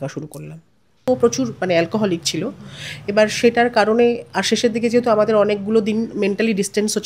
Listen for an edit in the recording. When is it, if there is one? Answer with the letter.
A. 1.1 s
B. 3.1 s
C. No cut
A